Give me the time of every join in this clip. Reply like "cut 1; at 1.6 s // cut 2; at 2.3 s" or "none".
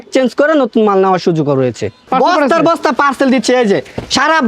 cut 1; at 2.1 s